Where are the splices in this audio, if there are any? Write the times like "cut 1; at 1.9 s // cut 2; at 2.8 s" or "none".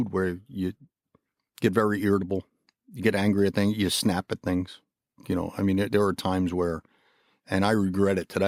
none